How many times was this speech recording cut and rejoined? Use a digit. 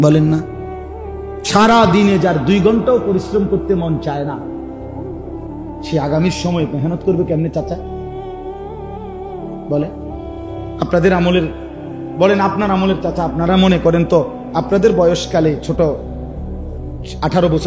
0